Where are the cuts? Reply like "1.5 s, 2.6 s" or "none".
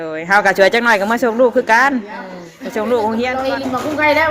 3.4 s